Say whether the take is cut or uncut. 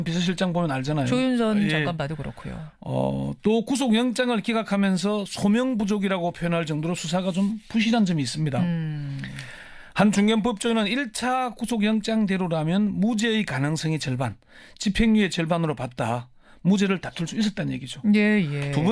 cut